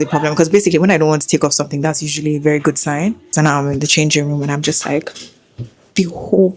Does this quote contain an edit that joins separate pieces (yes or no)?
yes